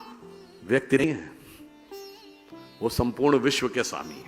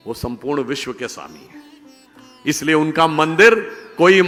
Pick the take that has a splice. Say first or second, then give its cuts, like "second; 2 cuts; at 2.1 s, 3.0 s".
first; 1 cut; at 1.0 s